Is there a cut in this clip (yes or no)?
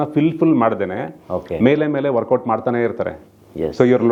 no